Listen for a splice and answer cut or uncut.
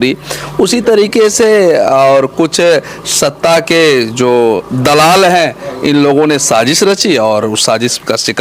uncut